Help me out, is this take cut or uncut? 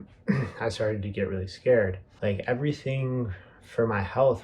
cut